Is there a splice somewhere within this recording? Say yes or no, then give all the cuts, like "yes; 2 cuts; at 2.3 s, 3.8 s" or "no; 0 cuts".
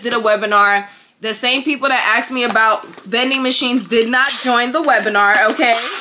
no; 0 cuts